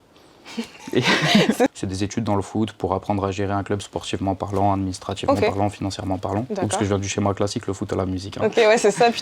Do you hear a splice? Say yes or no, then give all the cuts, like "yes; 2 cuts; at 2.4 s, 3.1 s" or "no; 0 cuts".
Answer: yes; 1 cut; at 1.7 s